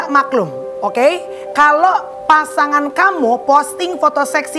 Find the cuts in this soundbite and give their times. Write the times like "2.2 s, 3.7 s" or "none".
none